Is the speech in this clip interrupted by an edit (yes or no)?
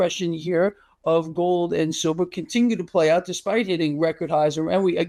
no